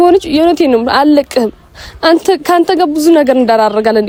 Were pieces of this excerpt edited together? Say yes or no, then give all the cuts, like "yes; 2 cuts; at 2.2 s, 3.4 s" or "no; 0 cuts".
no; 0 cuts